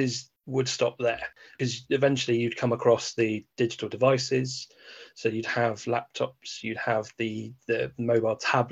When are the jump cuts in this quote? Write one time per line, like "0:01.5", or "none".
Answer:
0:01.5